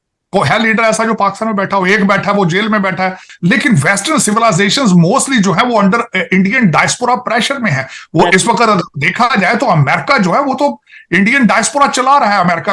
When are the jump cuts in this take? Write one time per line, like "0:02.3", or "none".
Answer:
0:03.2